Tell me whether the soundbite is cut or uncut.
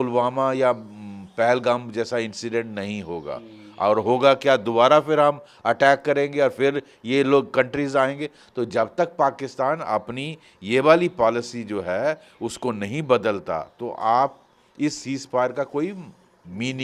uncut